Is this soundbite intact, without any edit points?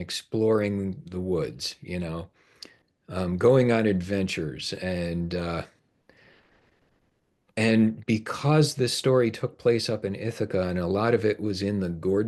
yes; 0 cuts

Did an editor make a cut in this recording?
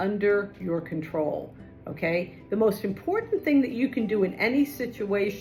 no; 0 cuts

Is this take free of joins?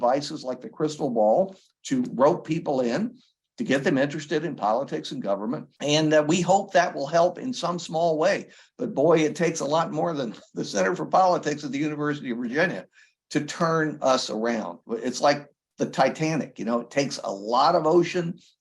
no; 1 cut; at 5.7 s

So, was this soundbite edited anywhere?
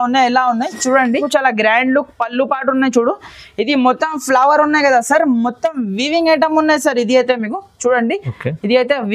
yes; 1 cut; at 1.3 s

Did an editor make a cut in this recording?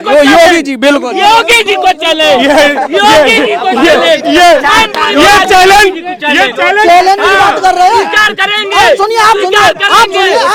no; 0 cuts

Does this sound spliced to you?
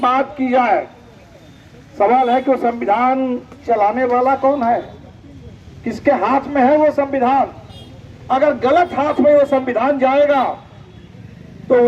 no; 0 cuts

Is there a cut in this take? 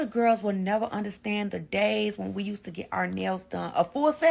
no; 0 cuts

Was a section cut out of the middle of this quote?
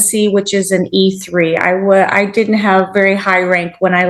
no; 0 cuts

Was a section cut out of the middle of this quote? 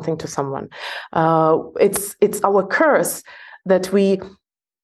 no; 0 cuts

